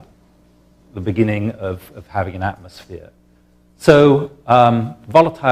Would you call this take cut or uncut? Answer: cut